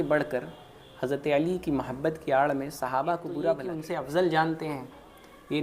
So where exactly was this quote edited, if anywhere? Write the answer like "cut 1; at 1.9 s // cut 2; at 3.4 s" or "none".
cut 1; at 3.7 s